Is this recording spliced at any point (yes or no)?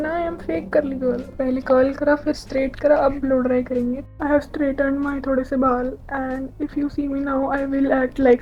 yes